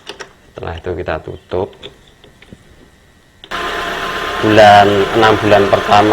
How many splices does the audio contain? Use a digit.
1